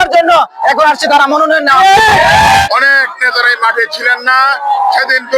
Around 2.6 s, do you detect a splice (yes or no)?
yes